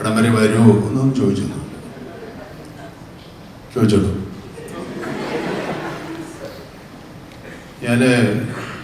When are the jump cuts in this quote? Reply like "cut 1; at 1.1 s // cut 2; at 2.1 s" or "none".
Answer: none